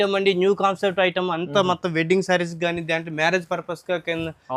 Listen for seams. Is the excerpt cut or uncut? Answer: uncut